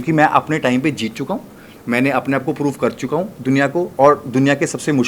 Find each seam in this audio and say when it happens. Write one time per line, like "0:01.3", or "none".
none